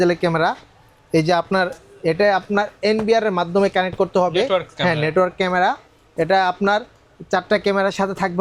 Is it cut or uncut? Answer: uncut